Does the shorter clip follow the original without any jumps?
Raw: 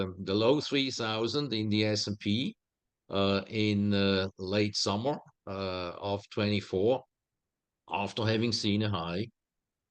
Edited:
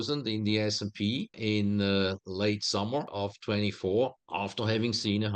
no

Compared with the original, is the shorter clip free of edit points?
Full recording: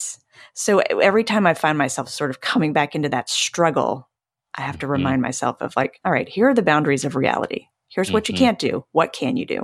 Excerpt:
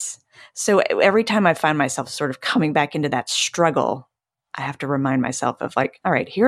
yes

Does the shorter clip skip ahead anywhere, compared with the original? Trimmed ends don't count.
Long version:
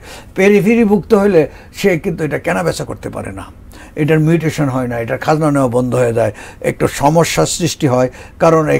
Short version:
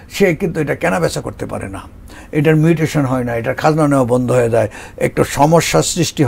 no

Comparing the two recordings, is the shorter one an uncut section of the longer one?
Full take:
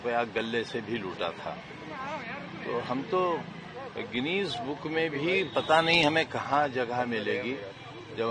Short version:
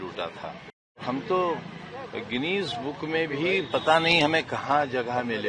no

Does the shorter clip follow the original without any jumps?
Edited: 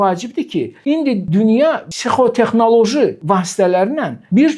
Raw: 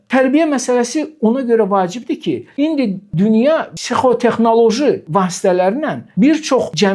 no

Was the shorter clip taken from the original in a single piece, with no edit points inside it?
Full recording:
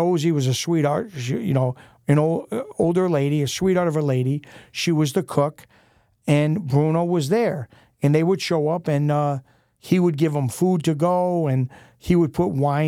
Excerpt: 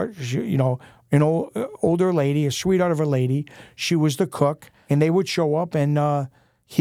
no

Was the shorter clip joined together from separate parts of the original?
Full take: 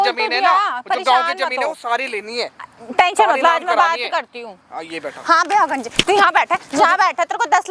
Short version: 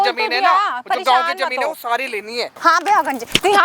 yes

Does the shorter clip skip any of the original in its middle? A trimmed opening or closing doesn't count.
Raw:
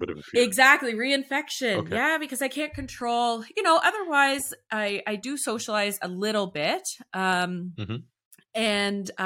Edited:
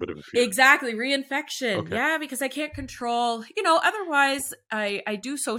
no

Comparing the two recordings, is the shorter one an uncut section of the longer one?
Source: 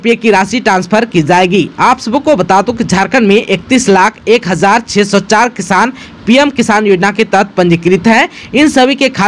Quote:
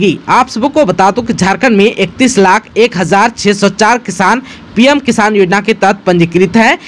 yes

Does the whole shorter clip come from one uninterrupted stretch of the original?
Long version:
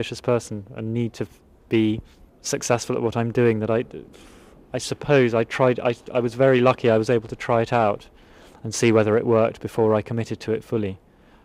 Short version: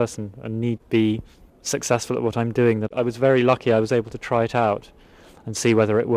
no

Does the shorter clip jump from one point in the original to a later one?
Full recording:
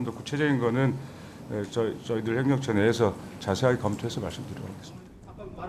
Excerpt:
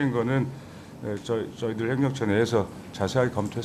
no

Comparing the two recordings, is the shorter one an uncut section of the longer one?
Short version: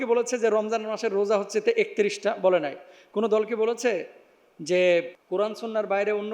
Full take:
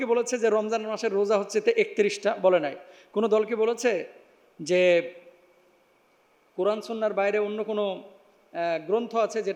no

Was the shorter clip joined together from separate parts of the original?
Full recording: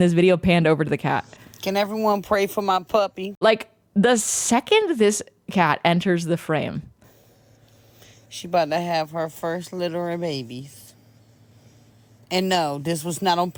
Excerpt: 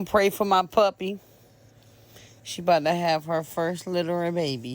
yes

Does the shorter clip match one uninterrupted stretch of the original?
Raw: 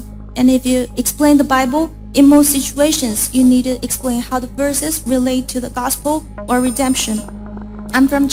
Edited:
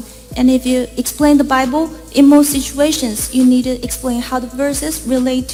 yes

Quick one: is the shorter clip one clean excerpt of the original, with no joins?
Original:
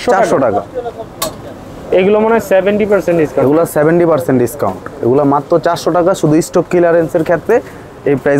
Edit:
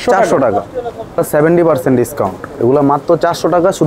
no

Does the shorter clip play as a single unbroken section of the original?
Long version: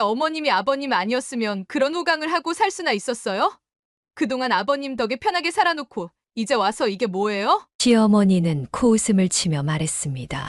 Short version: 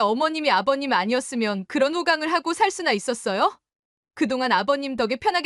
yes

